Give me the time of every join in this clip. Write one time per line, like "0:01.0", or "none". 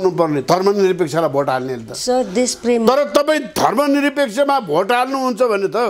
none